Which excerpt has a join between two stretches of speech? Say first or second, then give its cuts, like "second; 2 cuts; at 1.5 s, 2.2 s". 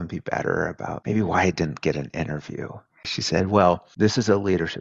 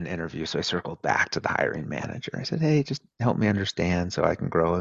first; 3 cuts; at 1.0 s, 3.1 s, 3.9 s